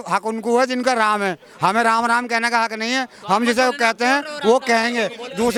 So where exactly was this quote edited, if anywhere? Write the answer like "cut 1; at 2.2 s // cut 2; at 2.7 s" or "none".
none